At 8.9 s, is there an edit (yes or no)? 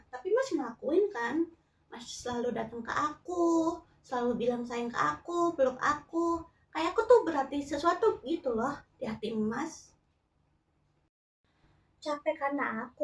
yes